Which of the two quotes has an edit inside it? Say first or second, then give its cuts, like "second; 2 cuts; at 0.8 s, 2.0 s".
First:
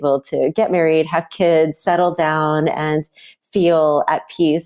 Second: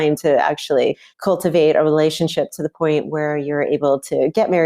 second; 1 cut; at 1.1 s